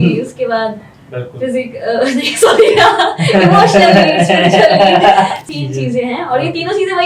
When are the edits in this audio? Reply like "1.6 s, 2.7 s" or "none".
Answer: 5.4 s

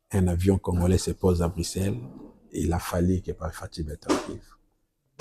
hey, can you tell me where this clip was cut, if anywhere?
none

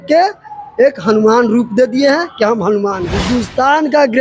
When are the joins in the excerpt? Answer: 3.1 s

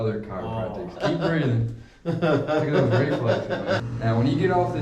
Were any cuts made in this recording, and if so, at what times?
1.0 s, 3.9 s

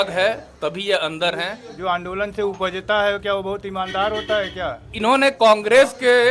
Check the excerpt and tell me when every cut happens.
1.7 s, 4.9 s

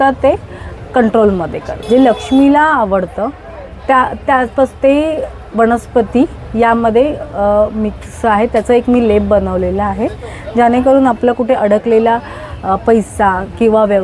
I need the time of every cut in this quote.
1.7 s

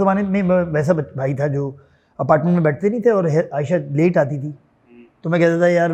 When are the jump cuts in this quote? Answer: none

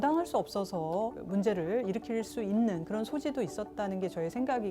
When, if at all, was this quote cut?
1.2 s

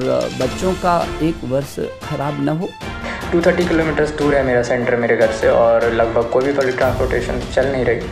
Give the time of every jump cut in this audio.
3.0 s

